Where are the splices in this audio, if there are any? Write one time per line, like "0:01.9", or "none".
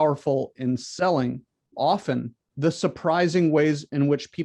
0:01.7
0:02.4